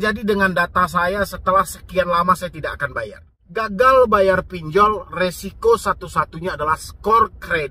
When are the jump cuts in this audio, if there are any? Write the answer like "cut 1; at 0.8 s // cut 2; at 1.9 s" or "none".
cut 1; at 3.7 s